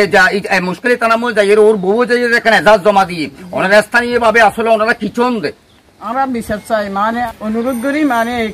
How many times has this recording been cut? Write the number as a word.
one